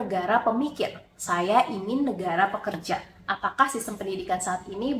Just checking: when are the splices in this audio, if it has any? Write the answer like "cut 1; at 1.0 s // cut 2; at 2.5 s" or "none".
cut 1; at 3.1 s